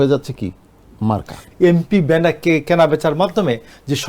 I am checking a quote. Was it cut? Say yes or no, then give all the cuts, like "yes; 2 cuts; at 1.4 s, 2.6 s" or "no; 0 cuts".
yes; 1 cut; at 1.4 s